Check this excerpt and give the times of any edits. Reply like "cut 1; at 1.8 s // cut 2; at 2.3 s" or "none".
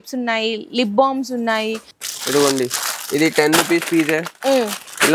cut 1; at 1.9 s